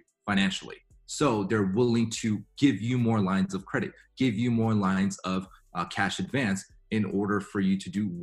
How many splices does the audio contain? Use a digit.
0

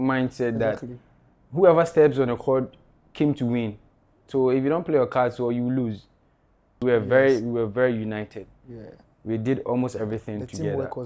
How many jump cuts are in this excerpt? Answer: 1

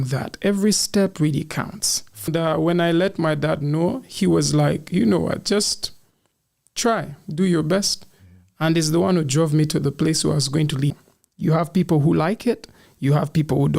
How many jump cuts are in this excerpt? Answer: 2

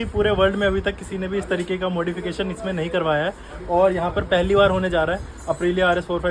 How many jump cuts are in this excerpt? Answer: 0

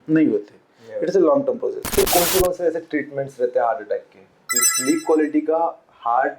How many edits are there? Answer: 2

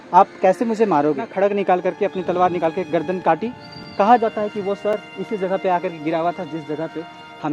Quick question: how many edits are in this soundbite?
1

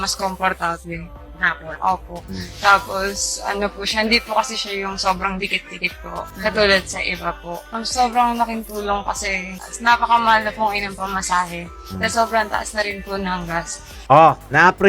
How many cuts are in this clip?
0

